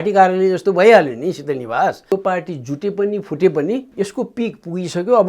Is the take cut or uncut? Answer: cut